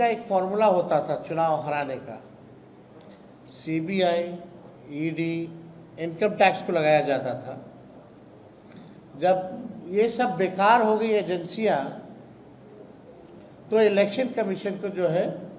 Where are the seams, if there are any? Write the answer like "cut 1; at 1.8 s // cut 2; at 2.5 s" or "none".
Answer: none